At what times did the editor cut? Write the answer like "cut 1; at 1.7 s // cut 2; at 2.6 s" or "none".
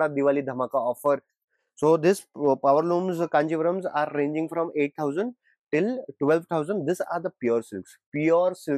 cut 1; at 1.4 s

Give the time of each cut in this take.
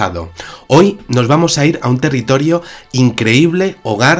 none

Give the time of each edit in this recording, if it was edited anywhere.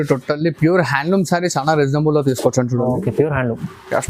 none

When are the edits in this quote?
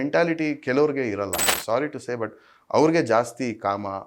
cut 1; at 1.5 s

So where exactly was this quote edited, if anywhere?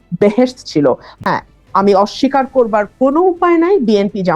cut 1; at 1.1 s

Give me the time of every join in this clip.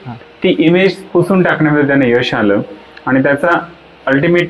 none

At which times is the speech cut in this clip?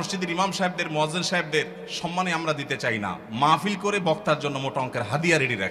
none

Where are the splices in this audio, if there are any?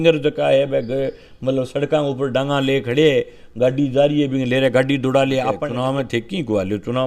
cut 1; at 5.7 s

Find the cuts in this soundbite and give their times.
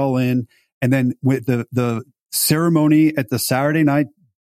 none

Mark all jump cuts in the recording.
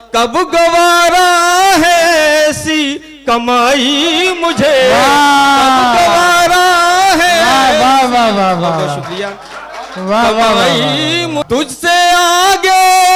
cut 1; at 11.4 s

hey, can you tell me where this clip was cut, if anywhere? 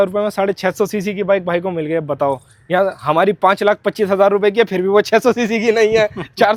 none

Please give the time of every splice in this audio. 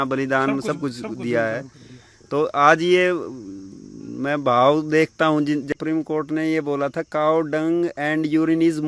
cut 1; at 5.7 s

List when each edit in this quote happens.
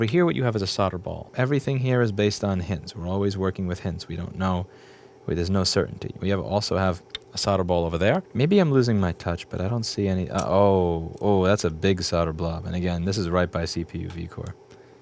cut 1; at 1.2 s // cut 2; at 8.3 s

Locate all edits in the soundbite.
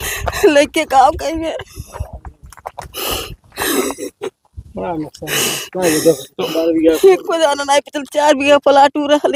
none

